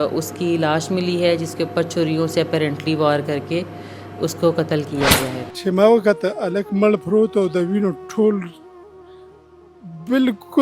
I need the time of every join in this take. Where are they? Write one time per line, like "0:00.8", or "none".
0:05.4